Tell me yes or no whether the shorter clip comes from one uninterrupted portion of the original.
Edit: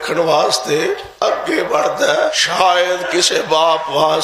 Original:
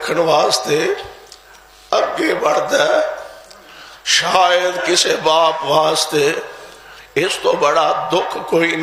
no